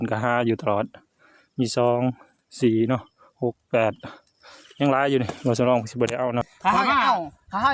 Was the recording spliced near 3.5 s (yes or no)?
no